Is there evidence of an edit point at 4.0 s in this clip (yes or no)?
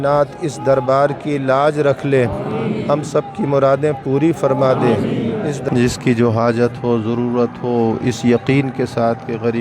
no